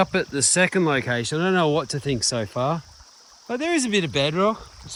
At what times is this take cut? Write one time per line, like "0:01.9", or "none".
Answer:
none